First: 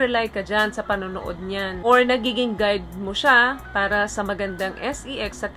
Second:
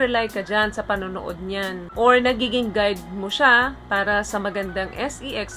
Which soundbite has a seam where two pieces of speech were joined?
first; 1 cut; at 1.8 s

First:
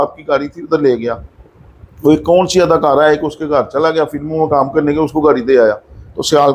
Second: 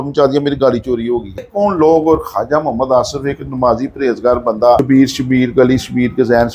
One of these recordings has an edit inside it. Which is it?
second; 2 cuts; at 1.5 s, 4.8 s

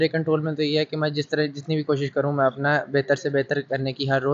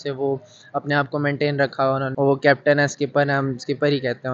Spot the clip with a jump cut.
second; 1 cut; at 2.1 s

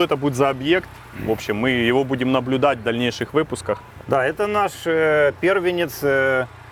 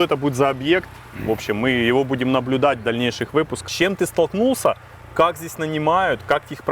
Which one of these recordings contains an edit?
second; 1 cut; at 3.6 s

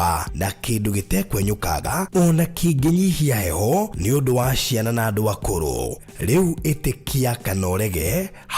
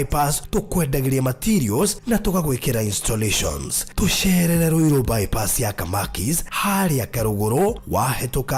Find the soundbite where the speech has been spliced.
first; 1 cut; at 1.8 s

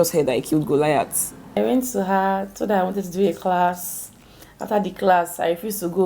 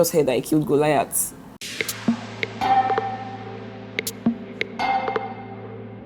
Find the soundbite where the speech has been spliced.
first; 1 cut; at 1.6 s

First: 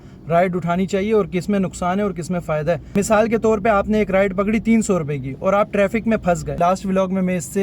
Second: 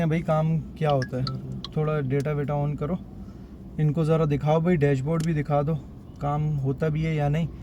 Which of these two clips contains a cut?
first; 2 cuts; at 2.9 s, 6.6 s

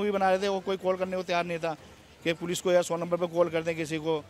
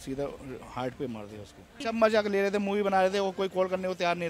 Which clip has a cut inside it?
second; 1 cut; at 1.8 s

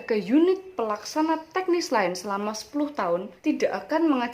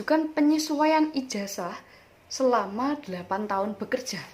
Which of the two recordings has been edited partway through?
first; 1 cut; at 3.3 s

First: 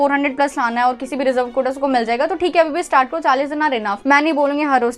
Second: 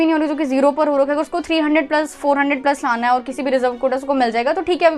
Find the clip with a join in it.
first; 1 cut; at 4.0 s

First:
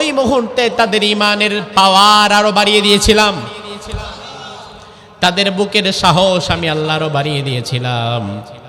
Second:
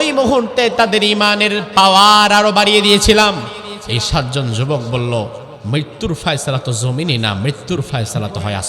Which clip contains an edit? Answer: second; 2 cuts; at 3.8 s, 5.5 s

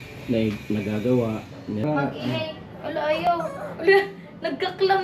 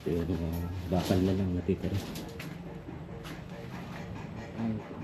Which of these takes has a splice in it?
first; 1 cut; at 1.8 s

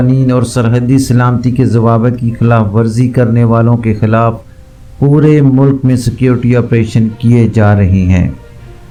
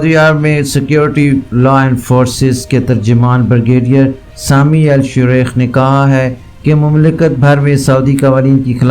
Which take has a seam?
second; 1 cut; at 1.5 s

